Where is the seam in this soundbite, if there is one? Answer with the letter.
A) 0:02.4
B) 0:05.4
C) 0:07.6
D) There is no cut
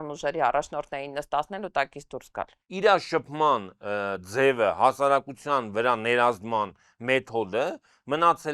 A